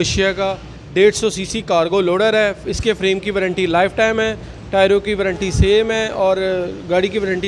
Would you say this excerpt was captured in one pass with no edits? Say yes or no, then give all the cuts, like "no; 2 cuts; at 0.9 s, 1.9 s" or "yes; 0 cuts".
yes; 0 cuts